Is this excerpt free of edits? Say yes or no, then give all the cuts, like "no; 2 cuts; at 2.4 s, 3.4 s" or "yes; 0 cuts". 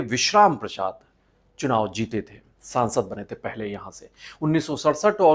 yes; 0 cuts